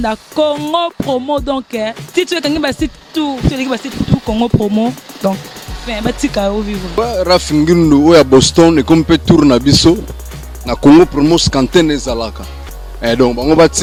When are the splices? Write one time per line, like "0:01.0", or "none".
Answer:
none